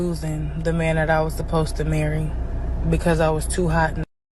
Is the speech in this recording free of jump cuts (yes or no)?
yes